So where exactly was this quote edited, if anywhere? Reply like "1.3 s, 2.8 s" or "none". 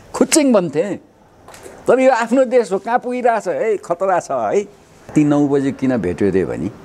5.1 s